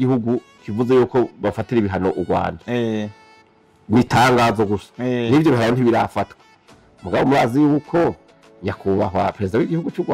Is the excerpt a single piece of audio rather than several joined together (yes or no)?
yes